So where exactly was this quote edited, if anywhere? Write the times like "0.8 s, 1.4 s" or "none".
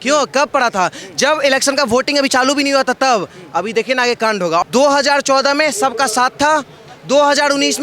4.6 s